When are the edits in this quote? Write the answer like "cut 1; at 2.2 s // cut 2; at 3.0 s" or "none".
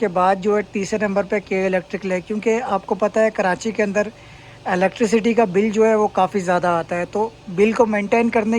none

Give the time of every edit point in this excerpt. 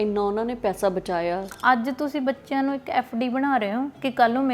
cut 1; at 1.5 s

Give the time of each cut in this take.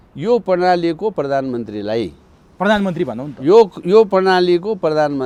none

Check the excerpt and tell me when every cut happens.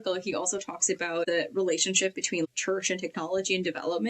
cut 1; at 1.3 s // cut 2; at 2.5 s

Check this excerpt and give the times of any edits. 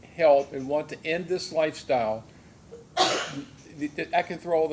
none

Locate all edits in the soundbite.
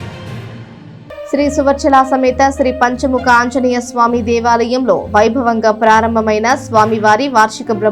none

